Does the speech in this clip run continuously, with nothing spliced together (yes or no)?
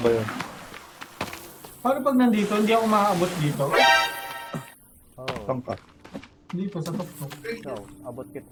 yes